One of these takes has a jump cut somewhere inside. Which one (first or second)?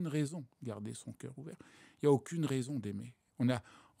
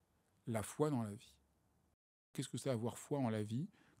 second